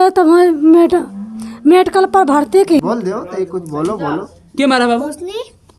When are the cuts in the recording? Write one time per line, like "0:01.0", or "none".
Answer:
0:02.8